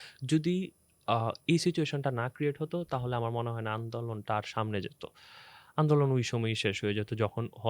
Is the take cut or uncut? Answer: uncut